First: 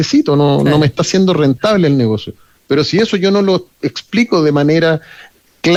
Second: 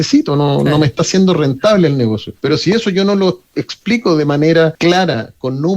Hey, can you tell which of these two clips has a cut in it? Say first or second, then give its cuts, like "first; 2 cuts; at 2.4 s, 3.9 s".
second; 2 cuts; at 2.3 s, 4.7 s